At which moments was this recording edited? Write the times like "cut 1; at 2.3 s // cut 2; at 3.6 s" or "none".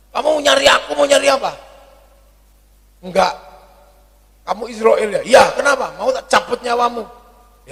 none